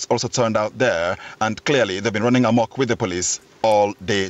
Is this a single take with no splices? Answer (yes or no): yes